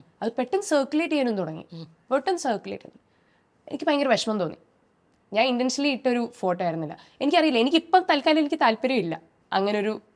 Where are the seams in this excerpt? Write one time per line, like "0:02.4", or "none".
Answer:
none

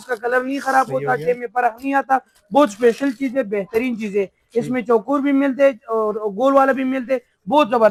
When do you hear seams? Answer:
none

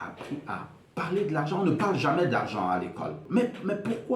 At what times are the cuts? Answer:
0:03.2

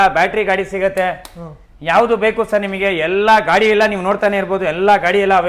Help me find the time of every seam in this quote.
none

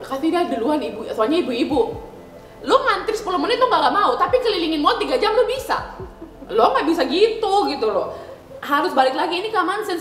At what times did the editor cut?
none

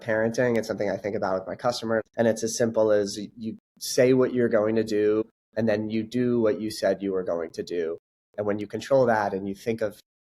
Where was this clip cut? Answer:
0:02.1
0:05.4

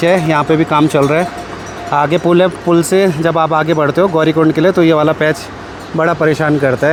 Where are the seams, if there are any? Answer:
none

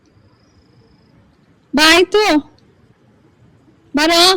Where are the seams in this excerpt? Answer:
none

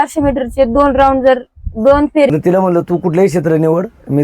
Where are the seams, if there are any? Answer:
0:02.3

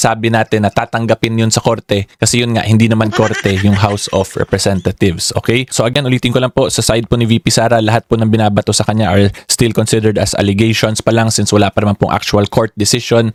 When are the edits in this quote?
none

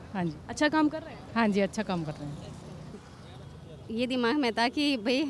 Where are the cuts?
0:02.9

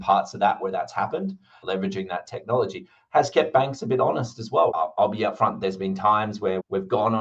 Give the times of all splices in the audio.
0:01.5
0:04.7

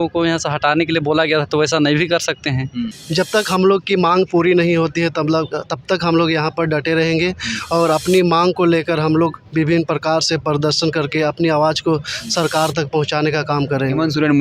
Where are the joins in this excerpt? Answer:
0:03.0

